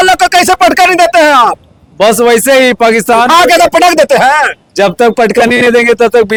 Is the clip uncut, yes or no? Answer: yes